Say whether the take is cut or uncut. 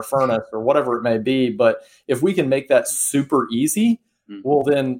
uncut